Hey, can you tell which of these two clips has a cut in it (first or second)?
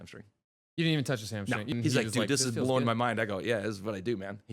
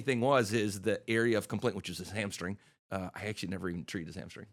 first